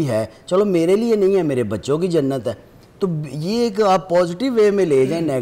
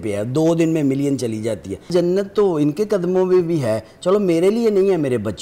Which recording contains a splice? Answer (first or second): second